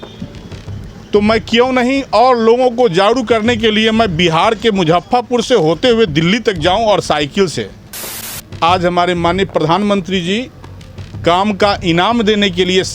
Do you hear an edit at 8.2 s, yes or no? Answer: yes